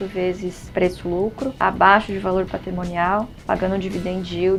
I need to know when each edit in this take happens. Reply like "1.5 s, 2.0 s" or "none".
none